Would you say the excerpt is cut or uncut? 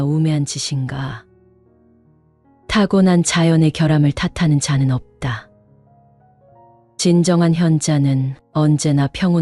uncut